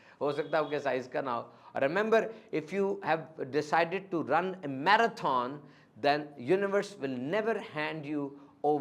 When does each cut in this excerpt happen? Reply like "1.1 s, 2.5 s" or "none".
none